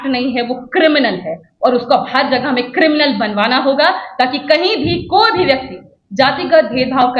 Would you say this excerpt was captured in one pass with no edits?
yes; 0 cuts

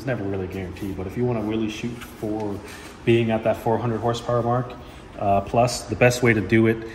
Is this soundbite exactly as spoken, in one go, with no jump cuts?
yes; 0 cuts

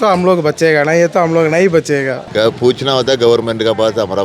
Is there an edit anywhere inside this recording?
yes; 1 cut; at 2.2 s

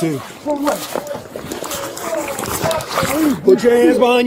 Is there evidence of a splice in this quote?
no; 0 cuts

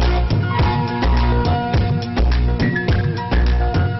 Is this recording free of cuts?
no; 1 cut; at 1.8 s

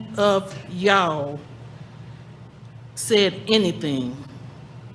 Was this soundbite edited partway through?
no; 0 cuts

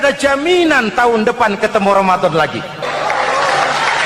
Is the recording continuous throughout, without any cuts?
no; 1 cut; at 2.8 s

